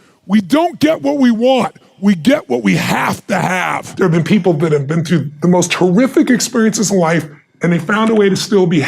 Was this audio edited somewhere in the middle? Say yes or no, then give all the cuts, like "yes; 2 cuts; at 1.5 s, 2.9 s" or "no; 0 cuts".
yes; 1 cut; at 3.8 s